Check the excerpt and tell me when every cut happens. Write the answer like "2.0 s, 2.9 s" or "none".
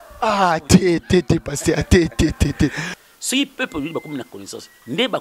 3.0 s